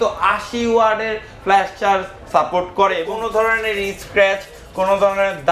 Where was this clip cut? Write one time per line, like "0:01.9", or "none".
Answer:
0:03.1